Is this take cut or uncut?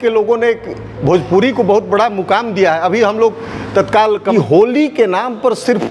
cut